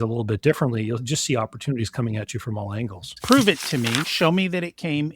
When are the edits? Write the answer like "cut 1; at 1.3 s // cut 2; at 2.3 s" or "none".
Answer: cut 1; at 3.1 s